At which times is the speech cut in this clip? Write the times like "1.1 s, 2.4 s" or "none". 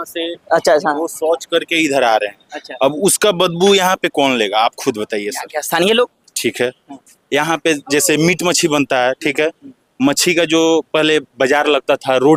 none